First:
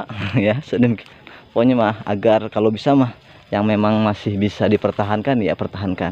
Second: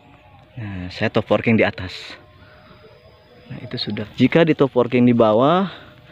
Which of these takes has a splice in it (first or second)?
second